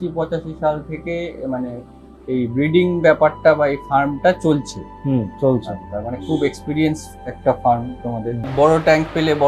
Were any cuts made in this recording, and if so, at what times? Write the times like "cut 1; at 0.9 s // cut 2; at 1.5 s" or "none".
cut 1; at 8.5 s